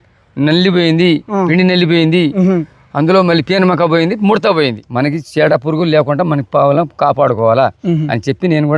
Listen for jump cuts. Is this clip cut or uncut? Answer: cut